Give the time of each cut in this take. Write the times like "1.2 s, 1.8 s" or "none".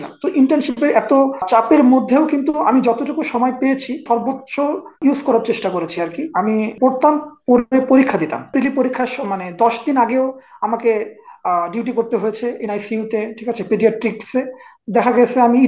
1.4 s, 4.4 s, 6.7 s, 8.5 s